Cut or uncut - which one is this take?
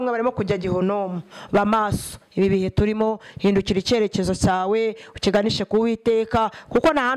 cut